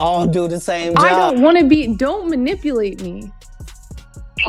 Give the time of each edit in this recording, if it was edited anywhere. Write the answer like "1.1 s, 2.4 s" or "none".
1.1 s